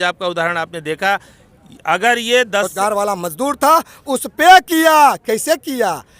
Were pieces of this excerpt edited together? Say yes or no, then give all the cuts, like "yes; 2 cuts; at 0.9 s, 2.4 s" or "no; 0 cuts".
yes; 1 cut; at 2.7 s